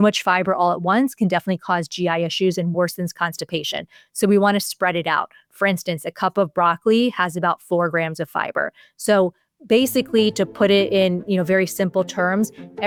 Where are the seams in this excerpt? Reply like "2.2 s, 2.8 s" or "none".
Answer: none